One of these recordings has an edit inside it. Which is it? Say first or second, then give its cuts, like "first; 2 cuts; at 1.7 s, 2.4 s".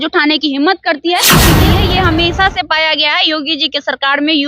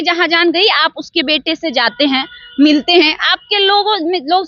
first; 1 cut; at 1.6 s